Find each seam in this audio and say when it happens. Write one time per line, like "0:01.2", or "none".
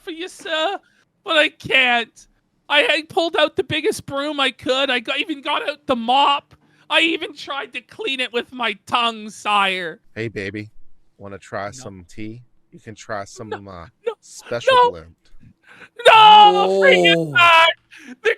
0:10.0